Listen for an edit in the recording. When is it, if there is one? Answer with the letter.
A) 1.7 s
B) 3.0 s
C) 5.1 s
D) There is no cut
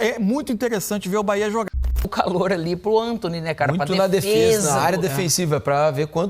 A